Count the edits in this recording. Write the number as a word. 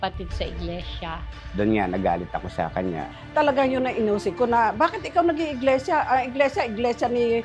zero